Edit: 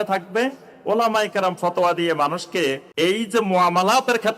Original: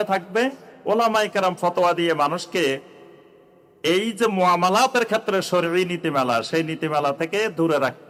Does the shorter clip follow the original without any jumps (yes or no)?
no